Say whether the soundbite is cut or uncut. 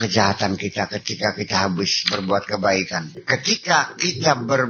cut